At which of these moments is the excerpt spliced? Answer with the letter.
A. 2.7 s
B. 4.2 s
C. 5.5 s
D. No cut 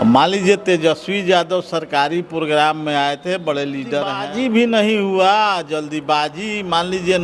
B